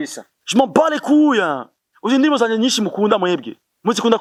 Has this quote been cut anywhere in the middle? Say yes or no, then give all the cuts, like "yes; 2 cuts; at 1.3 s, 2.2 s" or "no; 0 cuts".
no; 0 cuts